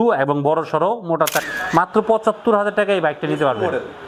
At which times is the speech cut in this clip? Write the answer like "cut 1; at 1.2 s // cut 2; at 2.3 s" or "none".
cut 1; at 1.4 s